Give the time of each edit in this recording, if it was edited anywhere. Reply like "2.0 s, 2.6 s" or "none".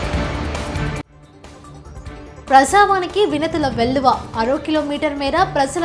2.5 s

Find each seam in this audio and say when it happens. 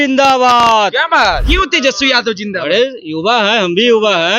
1.4 s

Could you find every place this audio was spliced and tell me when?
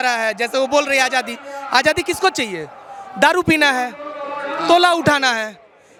none

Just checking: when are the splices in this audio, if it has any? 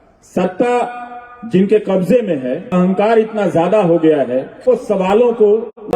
2.7 s, 4.6 s

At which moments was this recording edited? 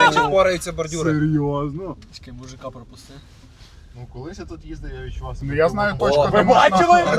none

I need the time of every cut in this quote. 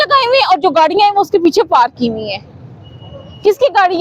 none

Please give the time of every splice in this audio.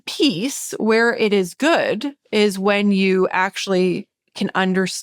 none

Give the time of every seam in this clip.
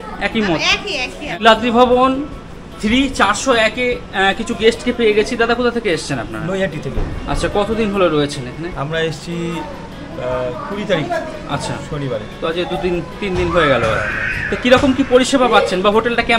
1.4 s

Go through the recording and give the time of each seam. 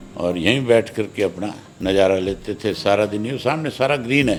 none

